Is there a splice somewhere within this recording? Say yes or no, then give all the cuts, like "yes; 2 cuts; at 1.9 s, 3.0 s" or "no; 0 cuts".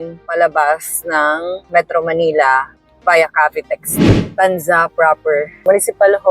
yes; 1 cut; at 3.9 s